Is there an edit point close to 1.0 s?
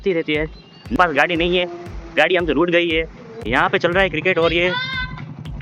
yes; 2 cuts; at 1.0 s, 3.4 s

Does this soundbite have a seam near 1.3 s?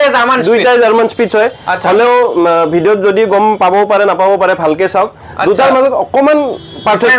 no; 0 cuts

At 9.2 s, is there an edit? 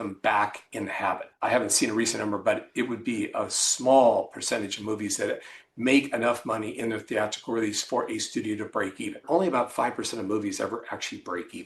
yes; 2 cuts; at 1.3 s, 9.2 s

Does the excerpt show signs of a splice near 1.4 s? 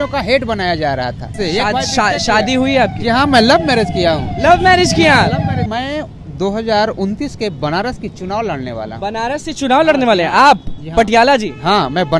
yes; 2 cuts; at 1.4 s, 5.6 s

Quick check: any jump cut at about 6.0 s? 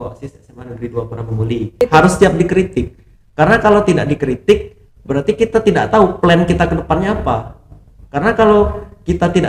no; 1 cut; at 1.8 s

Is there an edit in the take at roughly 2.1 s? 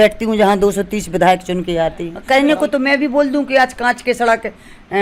yes; 1 cut; at 2.1 s

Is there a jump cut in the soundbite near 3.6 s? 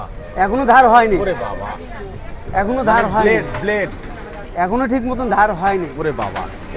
no; 0 cuts

